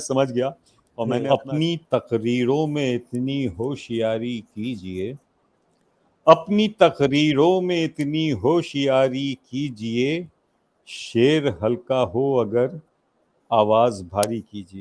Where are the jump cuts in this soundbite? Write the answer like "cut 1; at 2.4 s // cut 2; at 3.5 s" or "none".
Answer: cut 1; at 1.2 s